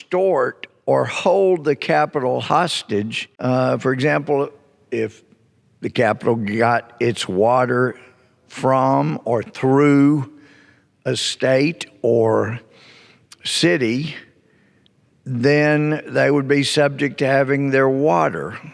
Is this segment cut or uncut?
uncut